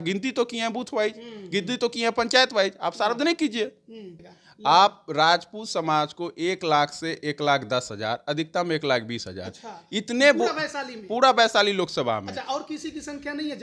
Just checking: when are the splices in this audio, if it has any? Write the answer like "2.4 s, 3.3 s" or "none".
4.2 s